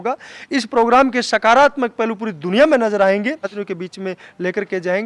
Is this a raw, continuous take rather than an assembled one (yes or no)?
no